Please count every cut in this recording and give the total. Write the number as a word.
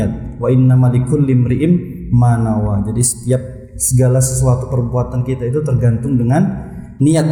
zero